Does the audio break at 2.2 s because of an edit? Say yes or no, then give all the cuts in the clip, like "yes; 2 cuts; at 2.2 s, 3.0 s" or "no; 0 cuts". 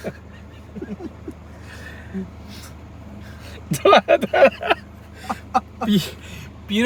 no; 0 cuts